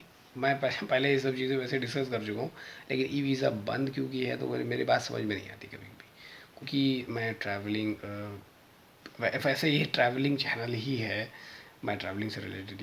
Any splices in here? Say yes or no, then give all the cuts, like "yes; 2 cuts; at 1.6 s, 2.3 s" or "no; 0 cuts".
yes; 1 cut; at 6.7 s